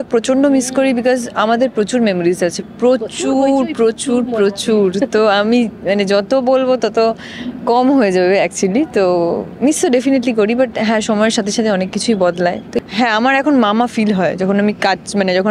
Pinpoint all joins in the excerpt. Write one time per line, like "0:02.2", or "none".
0:12.7